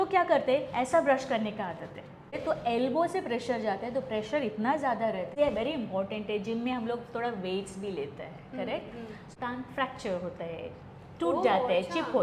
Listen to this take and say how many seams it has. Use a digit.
3